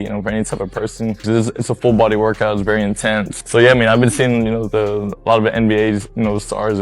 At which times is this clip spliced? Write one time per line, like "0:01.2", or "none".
none